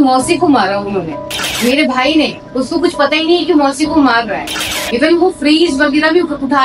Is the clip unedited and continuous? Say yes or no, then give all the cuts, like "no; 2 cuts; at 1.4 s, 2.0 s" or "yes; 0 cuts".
no; 2 cuts; at 1.4 s, 4.7 s